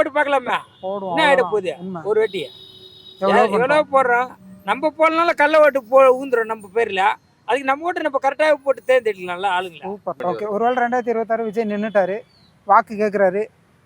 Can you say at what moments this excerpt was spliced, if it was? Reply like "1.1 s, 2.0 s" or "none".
10.2 s